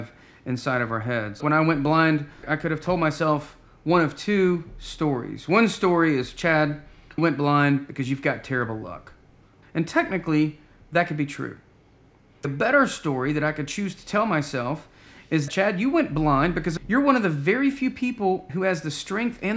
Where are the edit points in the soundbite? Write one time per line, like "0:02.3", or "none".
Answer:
0:01.4
0:02.5
0:07.2
0:09.6
0:12.5
0:15.5
0:16.7
0:18.5